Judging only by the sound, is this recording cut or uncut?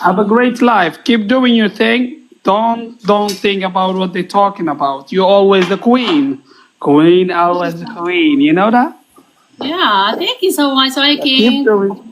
uncut